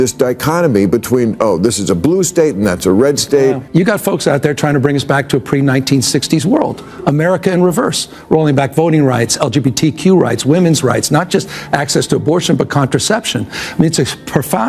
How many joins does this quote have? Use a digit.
1